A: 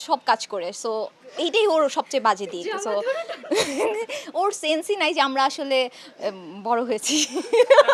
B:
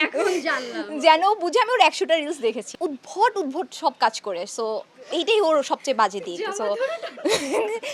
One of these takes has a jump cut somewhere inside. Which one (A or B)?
B